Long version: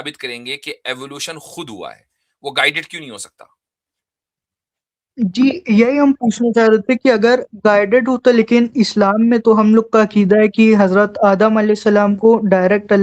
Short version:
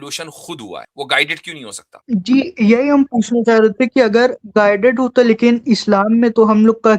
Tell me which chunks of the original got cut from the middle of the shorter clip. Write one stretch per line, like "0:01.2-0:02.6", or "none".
0:02.0-0:02.3
0:03.3-0:04.9